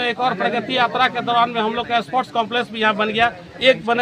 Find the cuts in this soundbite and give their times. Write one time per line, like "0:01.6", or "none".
none